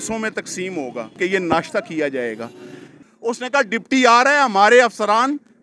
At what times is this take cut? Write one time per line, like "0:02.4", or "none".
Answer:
0:01.2
0:02.9